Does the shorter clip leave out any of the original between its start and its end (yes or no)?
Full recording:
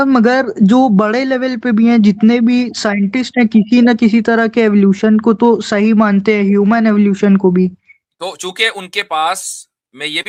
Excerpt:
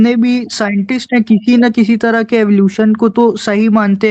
no